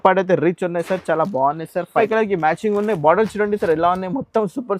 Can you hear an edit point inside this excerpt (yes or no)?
yes